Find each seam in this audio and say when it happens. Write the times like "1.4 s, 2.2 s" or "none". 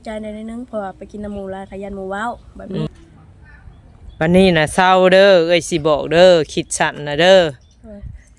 2.9 s